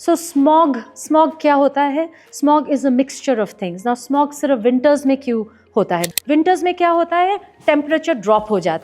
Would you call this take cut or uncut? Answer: cut